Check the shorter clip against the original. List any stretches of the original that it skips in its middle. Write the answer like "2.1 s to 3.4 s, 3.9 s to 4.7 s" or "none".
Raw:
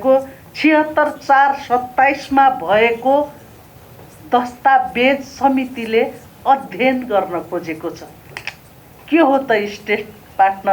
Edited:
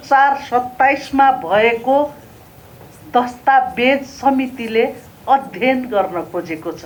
none